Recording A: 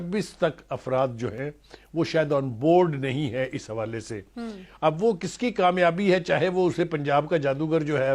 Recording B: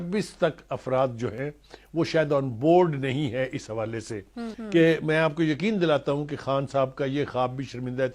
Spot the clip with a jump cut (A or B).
B